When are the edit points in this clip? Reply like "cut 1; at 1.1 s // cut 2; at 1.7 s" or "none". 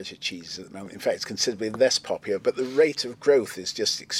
none